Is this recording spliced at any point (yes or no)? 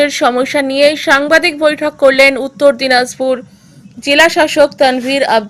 no